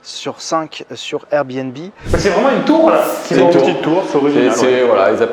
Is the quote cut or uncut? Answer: cut